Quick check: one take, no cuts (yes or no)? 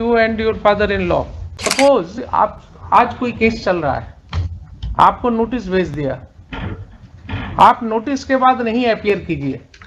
no